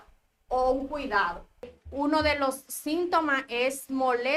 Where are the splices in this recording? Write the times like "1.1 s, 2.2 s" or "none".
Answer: 1.7 s